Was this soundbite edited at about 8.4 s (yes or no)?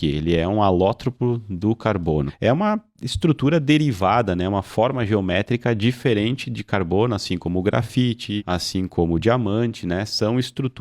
yes